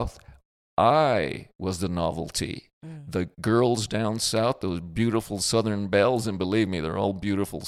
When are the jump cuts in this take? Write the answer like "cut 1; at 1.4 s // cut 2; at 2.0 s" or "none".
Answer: none

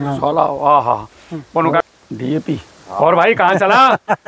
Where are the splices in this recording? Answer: cut 1; at 1.8 s

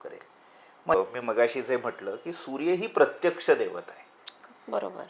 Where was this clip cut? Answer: cut 1; at 0.9 s

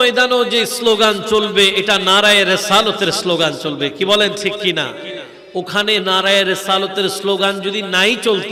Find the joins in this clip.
none

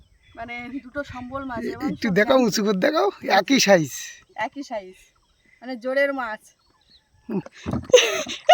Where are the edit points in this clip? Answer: cut 1; at 7.5 s

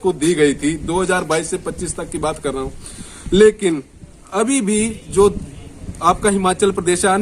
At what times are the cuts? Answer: none

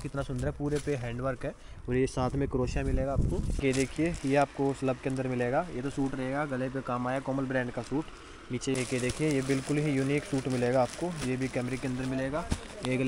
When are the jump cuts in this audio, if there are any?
cut 1; at 3.5 s // cut 2; at 8.8 s

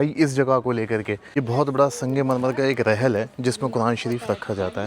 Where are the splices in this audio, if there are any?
cut 1; at 1.4 s

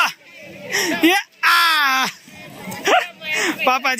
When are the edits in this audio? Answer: none

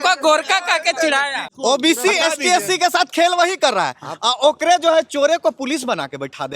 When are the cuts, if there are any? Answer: cut 1; at 1.4 s

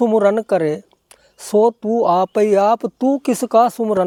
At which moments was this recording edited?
none

